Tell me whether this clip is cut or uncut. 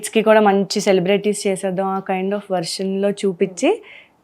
uncut